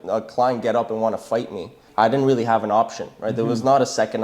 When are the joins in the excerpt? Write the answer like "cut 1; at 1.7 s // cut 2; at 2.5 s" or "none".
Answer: cut 1; at 1.8 s